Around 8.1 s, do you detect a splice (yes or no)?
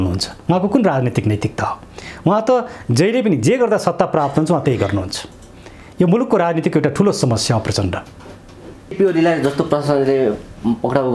no